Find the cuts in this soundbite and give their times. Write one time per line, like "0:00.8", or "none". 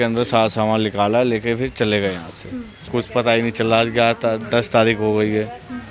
0:02.9